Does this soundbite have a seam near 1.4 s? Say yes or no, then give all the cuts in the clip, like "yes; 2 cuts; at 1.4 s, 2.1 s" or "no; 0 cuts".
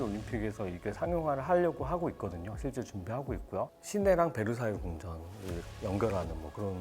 no; 1 cut; at 3.7 s